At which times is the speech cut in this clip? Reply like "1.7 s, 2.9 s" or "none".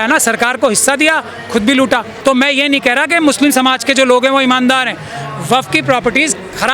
2.1 s

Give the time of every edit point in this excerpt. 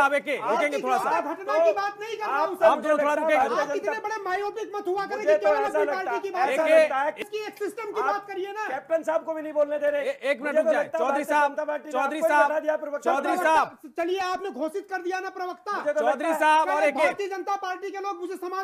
7.2 s

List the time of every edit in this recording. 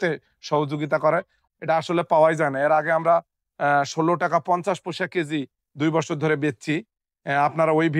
1.4 s

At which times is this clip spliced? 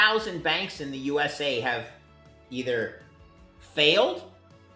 none

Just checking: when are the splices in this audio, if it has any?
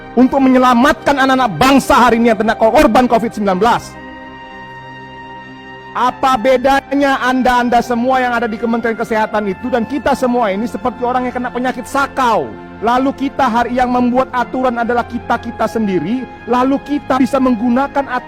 12.7 s

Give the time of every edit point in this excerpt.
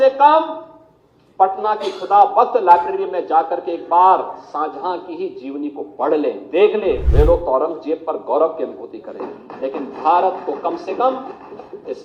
7.0 s

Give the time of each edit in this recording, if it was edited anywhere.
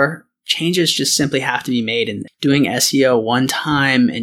2.2 s

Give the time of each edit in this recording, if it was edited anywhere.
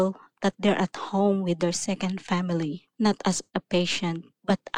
2.8 s

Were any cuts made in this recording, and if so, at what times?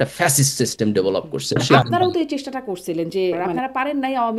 1.6 s, 3.5 s

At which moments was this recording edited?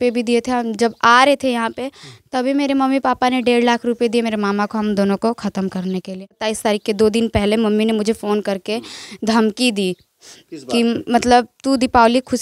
6.5 s

